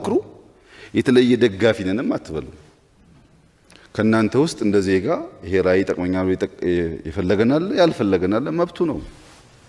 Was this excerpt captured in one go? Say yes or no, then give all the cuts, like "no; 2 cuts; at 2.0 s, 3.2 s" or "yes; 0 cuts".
yes; 0 cuts